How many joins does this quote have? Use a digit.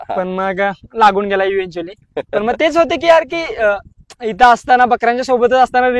0